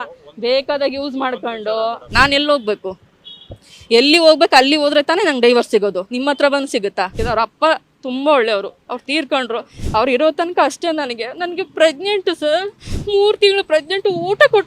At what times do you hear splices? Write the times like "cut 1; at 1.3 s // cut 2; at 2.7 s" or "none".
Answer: cut 1; at 2.0 s // cut 2; at 7.1 s